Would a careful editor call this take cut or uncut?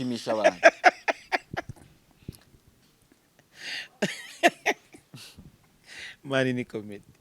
uncut